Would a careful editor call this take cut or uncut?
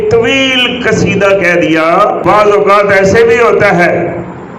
cut